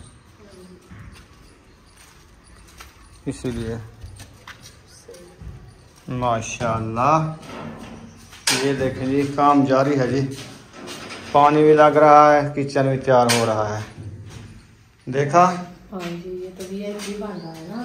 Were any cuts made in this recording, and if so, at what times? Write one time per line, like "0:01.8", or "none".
none